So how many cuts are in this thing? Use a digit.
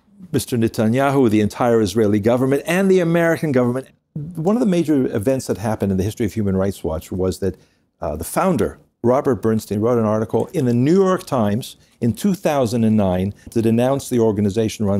3